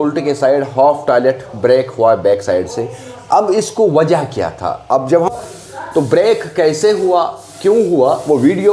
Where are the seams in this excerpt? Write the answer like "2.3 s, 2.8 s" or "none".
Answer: 5.3 s